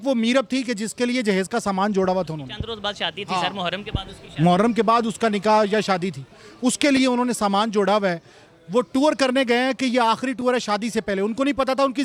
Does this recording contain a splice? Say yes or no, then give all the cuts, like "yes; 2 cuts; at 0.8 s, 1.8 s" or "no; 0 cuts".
no; 0 cuts